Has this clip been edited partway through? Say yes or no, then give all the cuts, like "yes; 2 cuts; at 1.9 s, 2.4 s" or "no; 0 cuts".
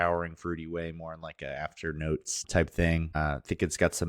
yes; 2 cuts; at 2.4 s, 3.1 s